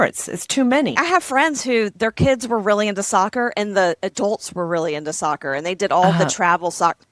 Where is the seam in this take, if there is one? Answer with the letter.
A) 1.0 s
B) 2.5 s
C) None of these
A